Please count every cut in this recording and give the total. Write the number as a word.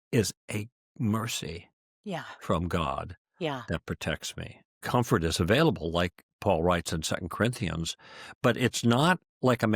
one